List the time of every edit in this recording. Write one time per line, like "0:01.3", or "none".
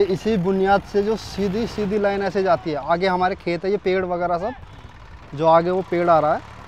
none